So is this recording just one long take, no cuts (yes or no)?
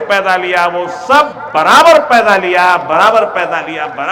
yes